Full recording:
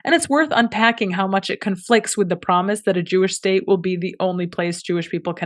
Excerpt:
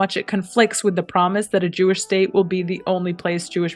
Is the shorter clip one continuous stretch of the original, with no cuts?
yes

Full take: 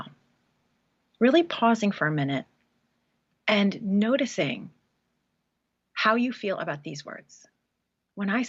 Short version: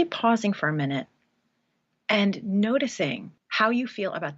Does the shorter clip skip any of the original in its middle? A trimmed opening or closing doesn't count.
yes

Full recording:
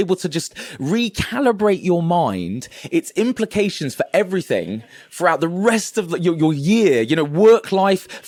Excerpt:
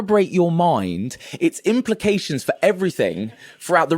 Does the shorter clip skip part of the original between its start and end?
no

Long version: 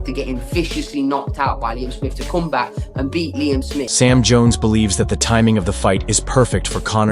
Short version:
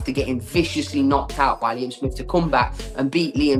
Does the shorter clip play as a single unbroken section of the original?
yes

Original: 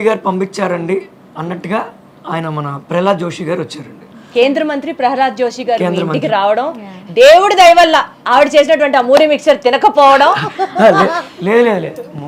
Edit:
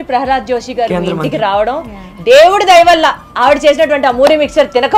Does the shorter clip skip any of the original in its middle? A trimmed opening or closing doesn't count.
no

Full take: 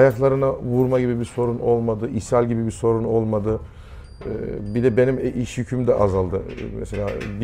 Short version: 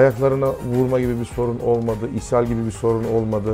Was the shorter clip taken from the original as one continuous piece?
yes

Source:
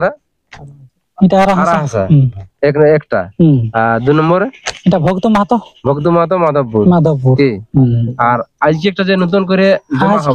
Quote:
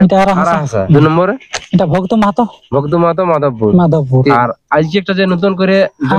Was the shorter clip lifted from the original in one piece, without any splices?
no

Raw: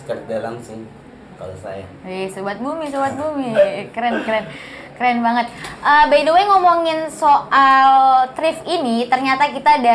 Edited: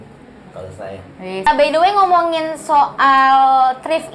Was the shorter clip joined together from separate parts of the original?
yes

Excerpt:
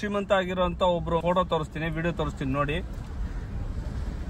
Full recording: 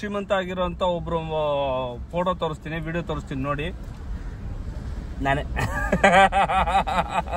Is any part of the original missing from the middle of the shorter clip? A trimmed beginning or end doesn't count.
yes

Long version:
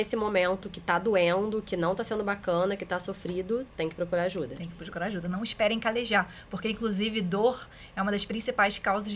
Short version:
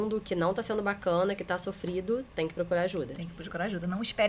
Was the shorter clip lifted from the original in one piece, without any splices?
yes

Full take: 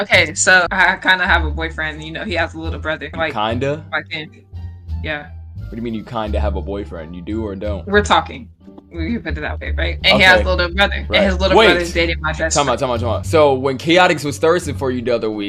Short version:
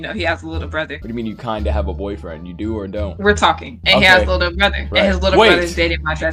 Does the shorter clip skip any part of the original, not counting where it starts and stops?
yes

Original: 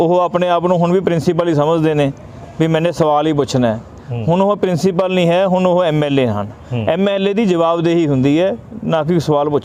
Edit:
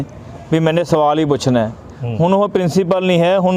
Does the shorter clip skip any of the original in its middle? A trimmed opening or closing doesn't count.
no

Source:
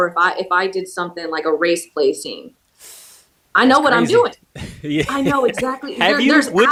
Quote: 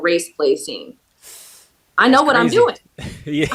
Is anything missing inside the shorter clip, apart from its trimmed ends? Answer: no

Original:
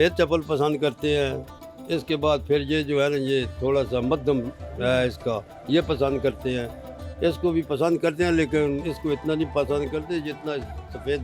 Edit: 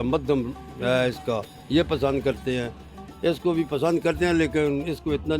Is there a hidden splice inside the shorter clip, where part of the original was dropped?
no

